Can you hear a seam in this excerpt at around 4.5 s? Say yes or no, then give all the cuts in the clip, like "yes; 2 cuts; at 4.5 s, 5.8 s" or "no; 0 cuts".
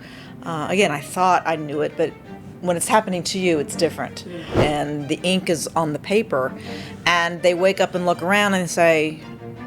yes; 1 cut; at 4.5 s